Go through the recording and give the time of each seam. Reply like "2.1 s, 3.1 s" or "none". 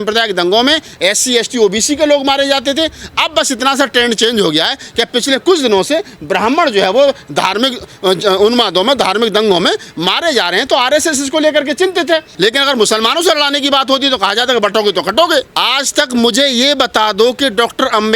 12.3 s, 15.5 s